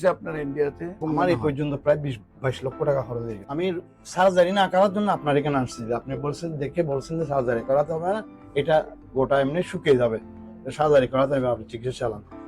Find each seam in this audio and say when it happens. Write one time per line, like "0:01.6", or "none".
0:01.0
0:03.4